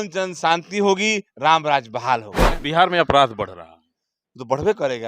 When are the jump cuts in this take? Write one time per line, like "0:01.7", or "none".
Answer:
0:02.6